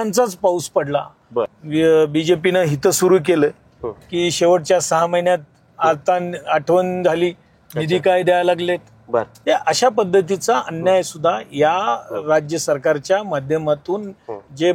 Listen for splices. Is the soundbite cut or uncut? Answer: cut